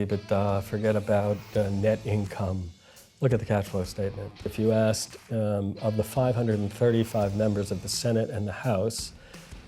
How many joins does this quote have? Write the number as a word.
one